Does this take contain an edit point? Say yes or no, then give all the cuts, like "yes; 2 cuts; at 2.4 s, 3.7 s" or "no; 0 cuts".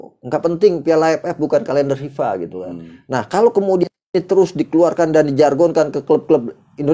no; 0 cuts